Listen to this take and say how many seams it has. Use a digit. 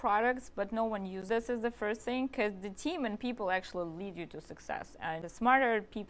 2